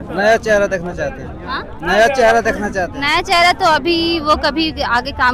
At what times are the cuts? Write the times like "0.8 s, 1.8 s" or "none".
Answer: none